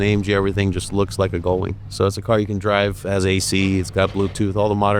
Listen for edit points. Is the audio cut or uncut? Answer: cut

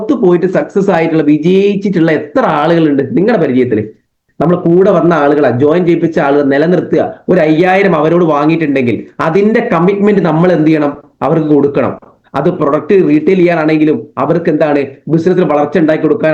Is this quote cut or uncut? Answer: cut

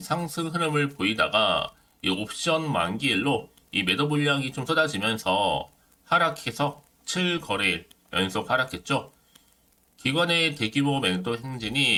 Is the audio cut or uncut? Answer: uncut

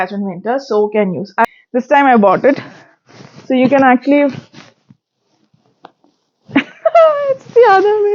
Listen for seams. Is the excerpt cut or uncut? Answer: cut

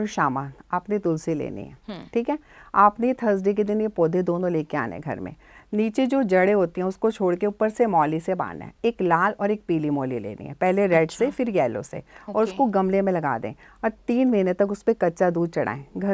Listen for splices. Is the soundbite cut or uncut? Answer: uncut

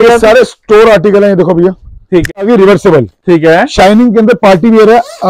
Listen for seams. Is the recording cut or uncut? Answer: cut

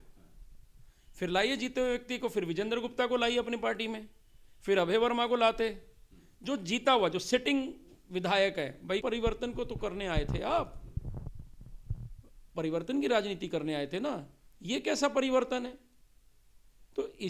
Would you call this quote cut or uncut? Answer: cut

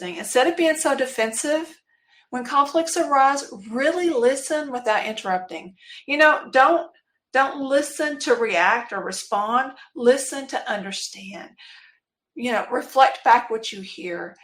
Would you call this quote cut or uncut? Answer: uncut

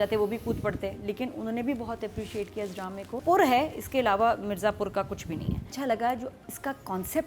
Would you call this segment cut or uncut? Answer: cut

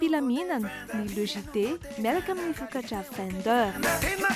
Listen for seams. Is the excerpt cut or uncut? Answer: uncut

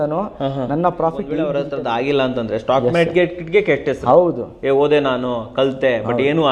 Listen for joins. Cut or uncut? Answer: cut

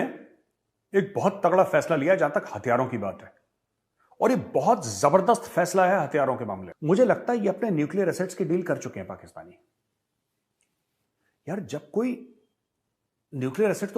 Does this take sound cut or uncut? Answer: cut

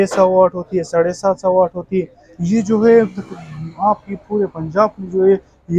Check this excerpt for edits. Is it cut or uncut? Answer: cut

